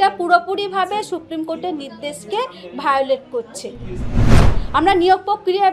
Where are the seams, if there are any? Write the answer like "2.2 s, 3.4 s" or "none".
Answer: 4.2 s